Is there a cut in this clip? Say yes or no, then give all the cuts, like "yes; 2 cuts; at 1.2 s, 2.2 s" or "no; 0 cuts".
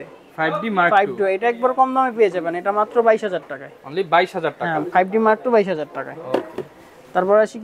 no; 0 cuts